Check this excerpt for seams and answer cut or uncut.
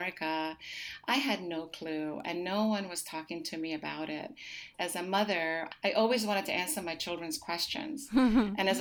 cut